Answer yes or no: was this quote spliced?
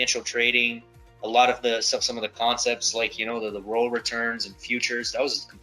no